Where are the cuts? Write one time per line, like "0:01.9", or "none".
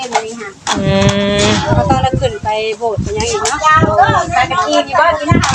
none

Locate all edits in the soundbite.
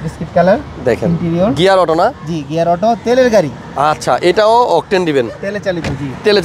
none

